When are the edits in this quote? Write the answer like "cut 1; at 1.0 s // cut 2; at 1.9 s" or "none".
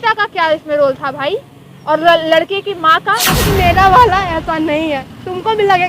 cut 1; at 3.4 s